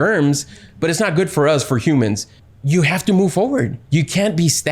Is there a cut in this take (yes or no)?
yes